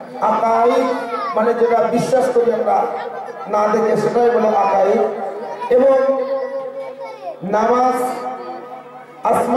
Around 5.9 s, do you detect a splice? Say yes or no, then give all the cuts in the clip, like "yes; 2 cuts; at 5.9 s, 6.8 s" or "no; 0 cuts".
no; 0 cuts